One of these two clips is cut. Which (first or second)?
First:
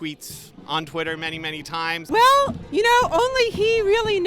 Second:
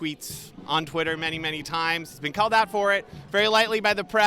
first